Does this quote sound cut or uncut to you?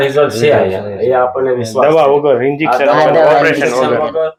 uncut